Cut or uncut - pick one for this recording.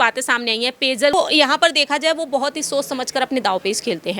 cut